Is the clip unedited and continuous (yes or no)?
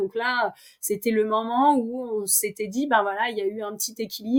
yes